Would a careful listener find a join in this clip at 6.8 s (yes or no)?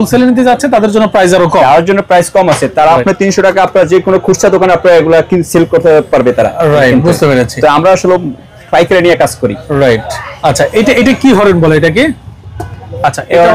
no